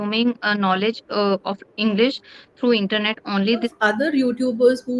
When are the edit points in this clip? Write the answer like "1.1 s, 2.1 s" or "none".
3.7 s